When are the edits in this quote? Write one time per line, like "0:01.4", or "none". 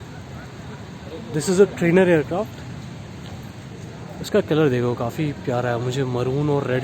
0:03.7

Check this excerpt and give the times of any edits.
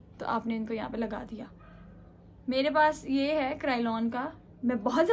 none

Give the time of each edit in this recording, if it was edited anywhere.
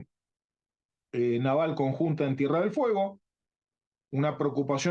none

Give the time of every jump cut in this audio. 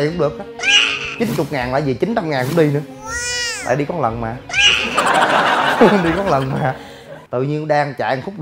0:07.3

